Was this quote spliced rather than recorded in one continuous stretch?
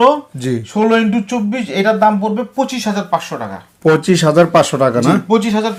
no; 0 cuts

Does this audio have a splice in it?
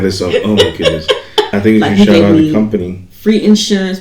yes; 1 cut; at 1.5 s

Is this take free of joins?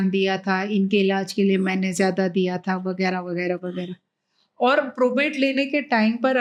yes; 0 cuts

